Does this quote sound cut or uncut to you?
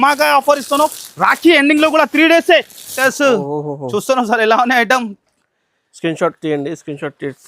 cut